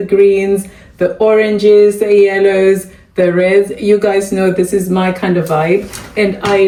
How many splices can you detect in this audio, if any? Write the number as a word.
zero